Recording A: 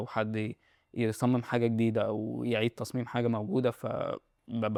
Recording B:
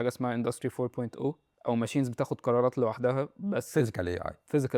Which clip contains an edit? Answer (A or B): B